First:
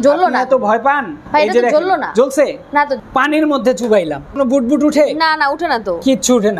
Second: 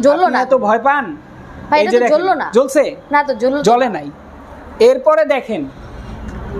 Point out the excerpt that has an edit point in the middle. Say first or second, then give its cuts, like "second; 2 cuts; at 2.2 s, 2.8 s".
first; 3 cuts; at 1.1 s, 3.0 s, 4.4 s